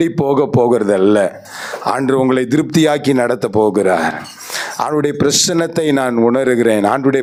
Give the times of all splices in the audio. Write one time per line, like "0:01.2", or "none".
none